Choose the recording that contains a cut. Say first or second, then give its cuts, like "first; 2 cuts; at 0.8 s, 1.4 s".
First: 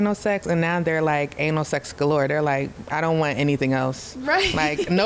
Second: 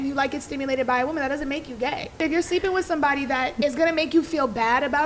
second; 2 cuts; at 2.2 s, 3.6 s